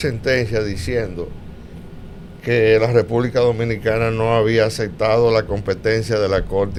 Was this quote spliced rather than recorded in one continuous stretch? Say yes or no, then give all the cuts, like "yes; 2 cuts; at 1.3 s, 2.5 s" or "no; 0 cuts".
no; 0 cuts